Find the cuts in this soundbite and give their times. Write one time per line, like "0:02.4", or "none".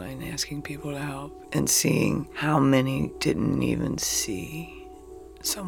0:02.3
0:03.1

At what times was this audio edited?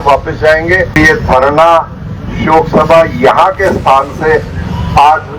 0:00.9

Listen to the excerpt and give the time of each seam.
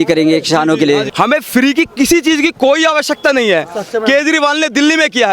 0:01.1

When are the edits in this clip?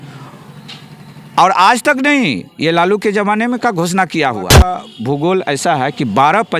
0:04.7

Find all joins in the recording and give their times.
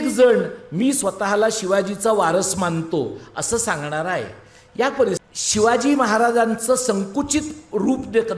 0:05.3

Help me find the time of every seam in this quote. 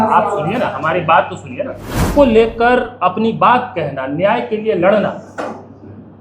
0:02.1

